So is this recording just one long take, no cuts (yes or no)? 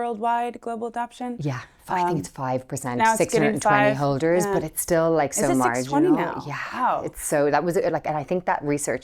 yes